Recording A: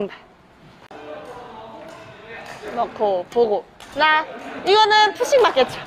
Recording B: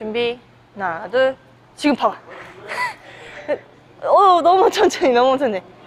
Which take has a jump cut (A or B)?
A